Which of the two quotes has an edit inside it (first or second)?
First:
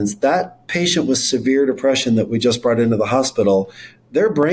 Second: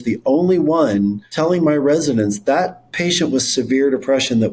second